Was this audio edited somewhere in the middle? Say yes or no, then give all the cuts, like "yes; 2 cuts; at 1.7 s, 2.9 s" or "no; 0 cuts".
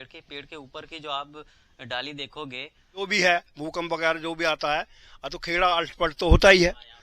yes; 1 cut; at 3.0 s